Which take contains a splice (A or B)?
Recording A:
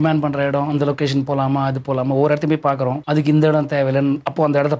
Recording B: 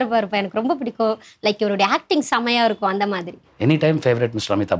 A